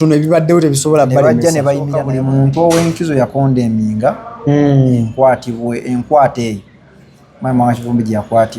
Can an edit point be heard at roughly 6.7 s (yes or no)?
no